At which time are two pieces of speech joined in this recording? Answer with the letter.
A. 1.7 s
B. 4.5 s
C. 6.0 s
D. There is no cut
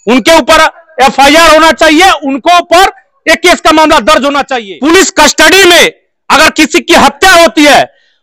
B